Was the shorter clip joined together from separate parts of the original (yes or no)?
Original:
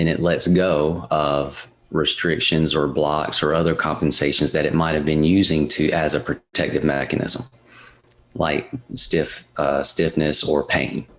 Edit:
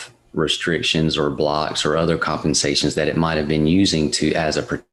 no